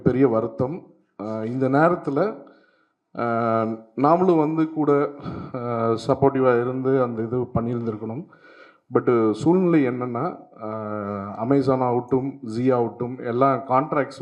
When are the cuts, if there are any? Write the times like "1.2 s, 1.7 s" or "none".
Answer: none